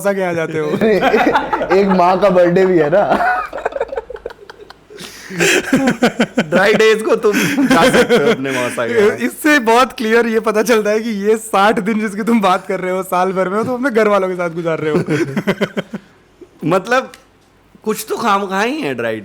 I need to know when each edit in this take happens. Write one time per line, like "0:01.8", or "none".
none

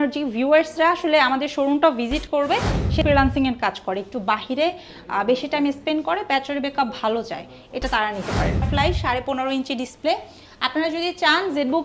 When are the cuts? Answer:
0:03.0
0:08.7

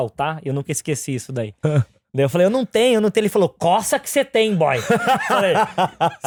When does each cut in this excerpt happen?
none

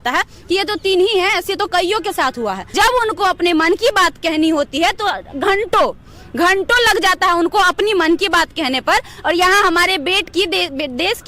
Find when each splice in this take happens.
0:02.7

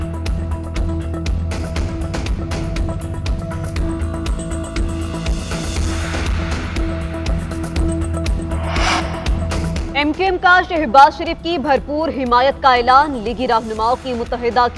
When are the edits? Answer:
none

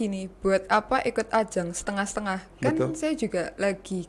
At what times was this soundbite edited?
none

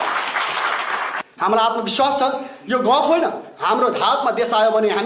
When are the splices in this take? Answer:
0:01.1

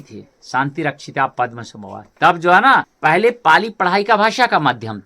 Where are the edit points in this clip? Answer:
0:02.9

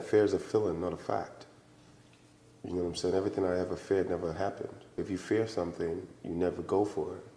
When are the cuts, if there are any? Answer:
0:05.0

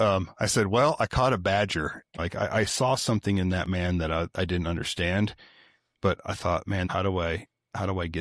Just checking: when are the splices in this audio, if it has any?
0:02.0
0:06.9

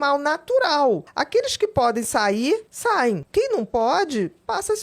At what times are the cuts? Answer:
0:01.1
0:02.9

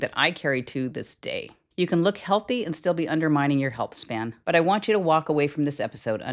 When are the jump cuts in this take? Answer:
0:01.6
0:04.3

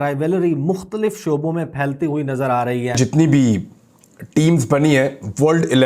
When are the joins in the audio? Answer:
0:02.9

